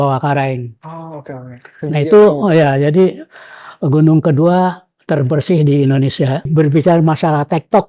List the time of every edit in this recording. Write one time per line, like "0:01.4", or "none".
0:06.5